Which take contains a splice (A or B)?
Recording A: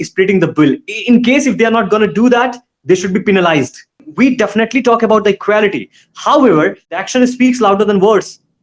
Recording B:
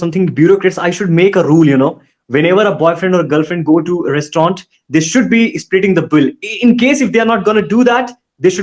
A